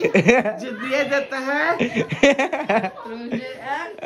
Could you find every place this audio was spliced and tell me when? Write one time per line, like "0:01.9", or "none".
none